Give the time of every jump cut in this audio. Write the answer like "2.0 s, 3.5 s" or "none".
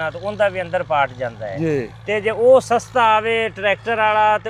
none